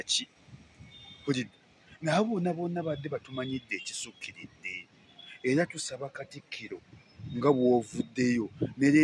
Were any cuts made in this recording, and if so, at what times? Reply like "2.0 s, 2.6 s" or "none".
none